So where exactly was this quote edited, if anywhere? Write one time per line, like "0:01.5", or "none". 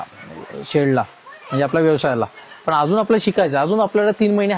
none